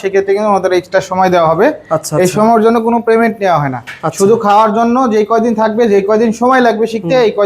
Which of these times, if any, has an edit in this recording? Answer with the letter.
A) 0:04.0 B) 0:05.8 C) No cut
C